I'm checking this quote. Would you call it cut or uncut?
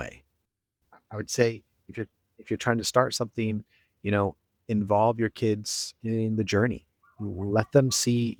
uncut